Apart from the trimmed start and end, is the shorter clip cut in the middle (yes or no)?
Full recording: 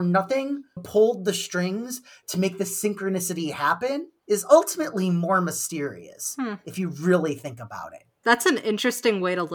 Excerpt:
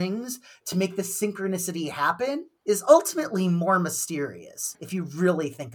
yes